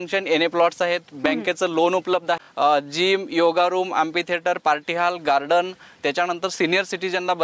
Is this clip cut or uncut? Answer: cut